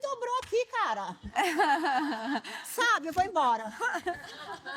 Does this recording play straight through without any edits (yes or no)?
yes